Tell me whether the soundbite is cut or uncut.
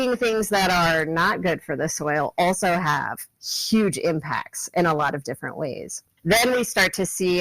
cut